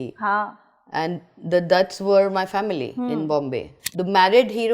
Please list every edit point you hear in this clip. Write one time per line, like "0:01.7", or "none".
0:03.8

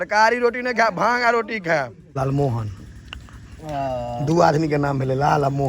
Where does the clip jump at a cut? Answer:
0:02.2

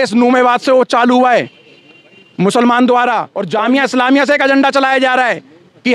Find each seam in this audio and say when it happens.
0:03.3

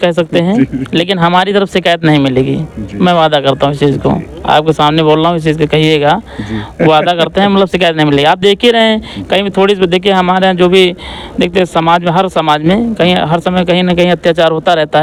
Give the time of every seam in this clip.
none

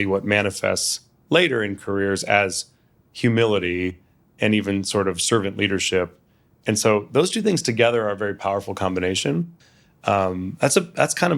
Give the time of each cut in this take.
0:09.5

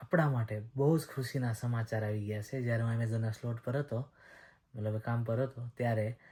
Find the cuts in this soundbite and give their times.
none

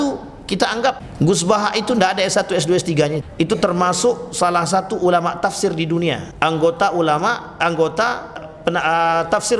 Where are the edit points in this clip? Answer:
0:01.1
0:03.3
0:06.3
0:08.4

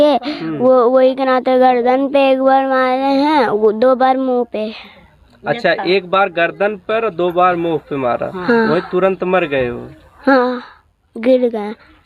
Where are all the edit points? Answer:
none

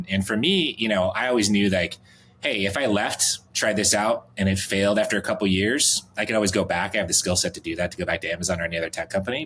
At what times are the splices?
none

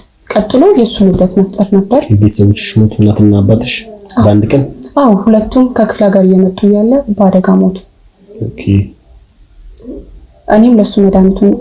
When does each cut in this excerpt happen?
none

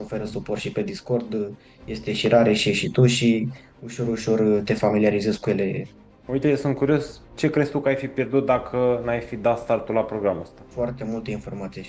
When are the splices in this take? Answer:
0:05.9
0:10.6

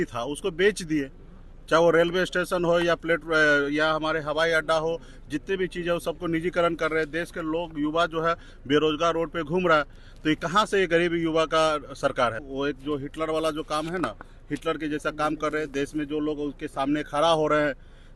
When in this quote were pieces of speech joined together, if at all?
0:12.4

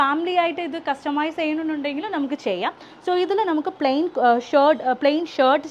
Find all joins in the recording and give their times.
none

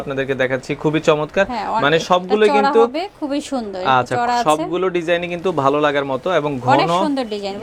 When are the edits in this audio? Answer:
none

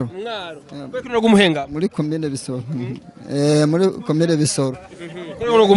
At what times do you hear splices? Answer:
none

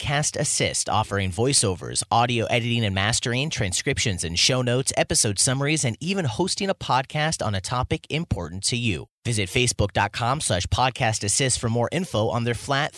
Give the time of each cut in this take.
none

